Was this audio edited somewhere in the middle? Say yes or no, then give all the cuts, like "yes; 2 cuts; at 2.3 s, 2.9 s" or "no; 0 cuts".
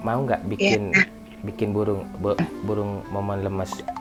no; 0 cuts